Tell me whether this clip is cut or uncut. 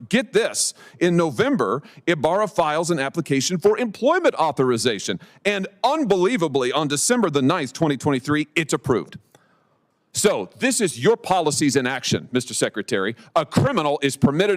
uncut